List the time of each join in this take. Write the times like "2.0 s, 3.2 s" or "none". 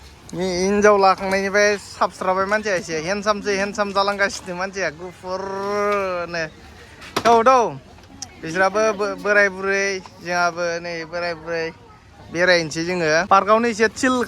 13.3 s